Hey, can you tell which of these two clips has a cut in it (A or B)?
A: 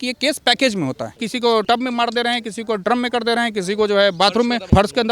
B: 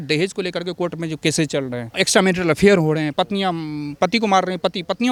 A